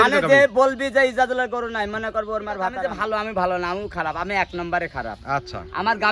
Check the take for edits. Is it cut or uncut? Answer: cut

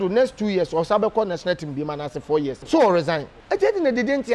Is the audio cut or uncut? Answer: cut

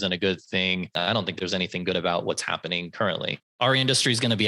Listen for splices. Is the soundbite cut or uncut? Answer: cut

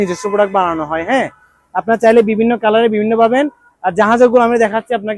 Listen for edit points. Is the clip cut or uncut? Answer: uncut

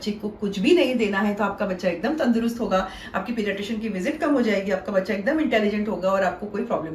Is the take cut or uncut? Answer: uncut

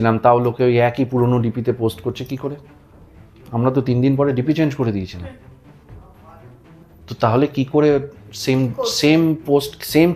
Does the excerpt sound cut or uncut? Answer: uncut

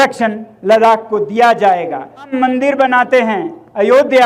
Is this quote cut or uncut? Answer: cut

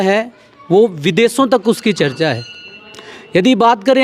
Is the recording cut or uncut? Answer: uncut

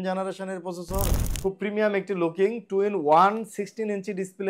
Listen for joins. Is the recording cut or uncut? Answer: cut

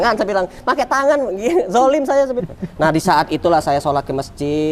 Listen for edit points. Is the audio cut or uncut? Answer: cut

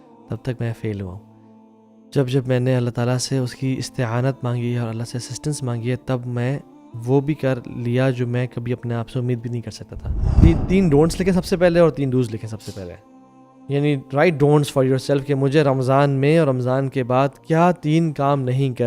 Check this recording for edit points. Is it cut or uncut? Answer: cut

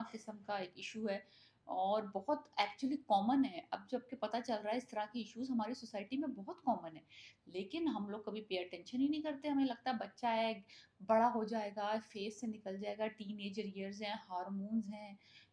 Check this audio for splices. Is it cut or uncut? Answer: uncut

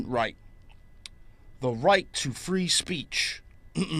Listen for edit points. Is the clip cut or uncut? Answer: cut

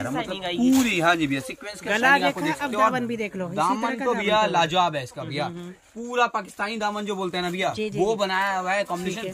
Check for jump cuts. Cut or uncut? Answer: uncut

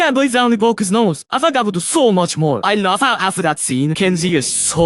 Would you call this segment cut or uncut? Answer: cut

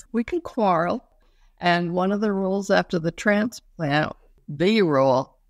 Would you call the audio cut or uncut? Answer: cut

